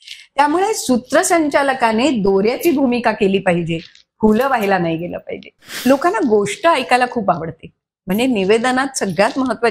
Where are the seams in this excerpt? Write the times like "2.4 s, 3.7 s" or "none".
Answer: 5.7 s